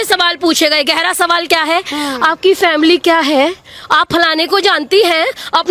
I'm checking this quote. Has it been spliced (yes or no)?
no